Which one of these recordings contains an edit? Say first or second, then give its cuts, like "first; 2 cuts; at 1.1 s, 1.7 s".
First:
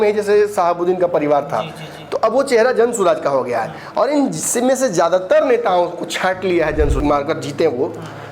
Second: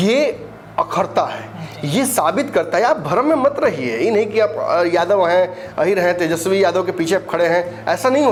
first; 1 cut; at 7.0 s